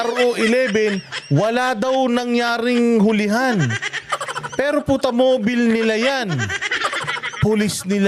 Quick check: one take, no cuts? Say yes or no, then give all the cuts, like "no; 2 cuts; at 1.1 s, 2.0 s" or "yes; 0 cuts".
yes; 0 cuts